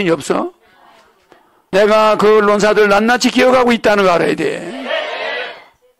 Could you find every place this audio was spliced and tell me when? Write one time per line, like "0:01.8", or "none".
0:01.6